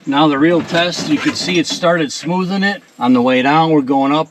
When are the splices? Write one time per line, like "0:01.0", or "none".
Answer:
0:02.9